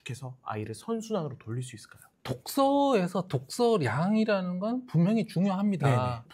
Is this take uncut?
yes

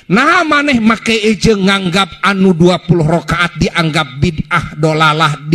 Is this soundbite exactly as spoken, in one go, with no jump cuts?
yes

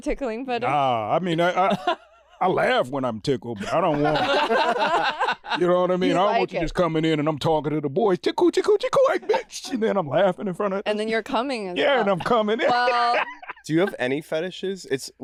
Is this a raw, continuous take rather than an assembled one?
yes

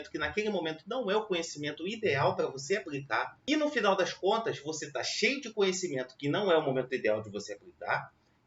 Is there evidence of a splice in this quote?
yes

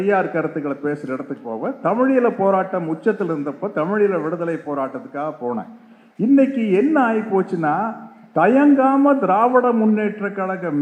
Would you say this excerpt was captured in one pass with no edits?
yes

